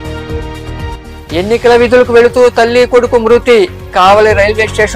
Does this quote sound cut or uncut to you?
cut